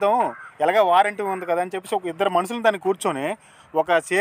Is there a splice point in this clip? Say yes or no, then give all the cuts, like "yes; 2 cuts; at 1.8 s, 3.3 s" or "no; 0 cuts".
no; 0 cuts